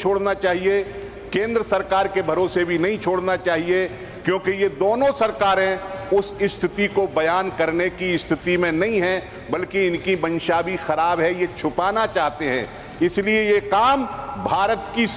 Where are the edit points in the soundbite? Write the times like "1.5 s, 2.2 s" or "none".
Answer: none